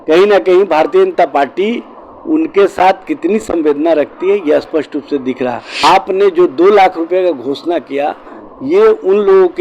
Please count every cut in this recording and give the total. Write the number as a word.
one